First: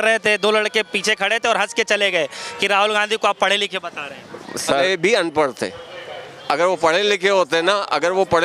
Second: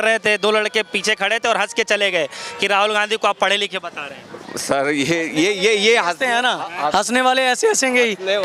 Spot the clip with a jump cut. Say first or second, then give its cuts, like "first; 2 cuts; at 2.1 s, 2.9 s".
first; 1 cut; at 4.8 s